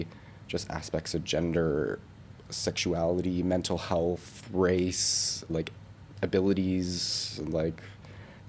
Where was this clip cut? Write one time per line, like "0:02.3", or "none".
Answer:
0:05.5